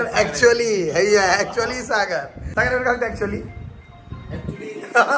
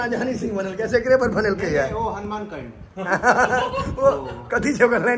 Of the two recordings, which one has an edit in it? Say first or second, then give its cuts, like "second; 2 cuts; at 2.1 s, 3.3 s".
first; 1 cut; at 2.4 s